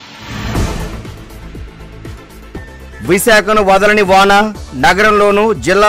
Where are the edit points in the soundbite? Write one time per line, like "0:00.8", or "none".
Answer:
0:01.3
0:02.8